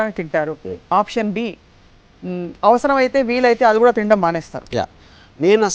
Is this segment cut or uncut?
uncut